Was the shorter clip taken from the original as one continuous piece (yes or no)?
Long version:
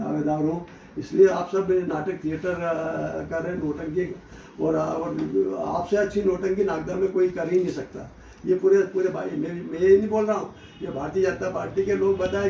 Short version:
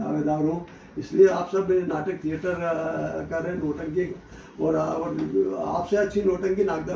yes